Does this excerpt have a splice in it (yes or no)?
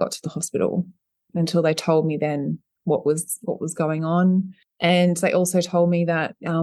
yes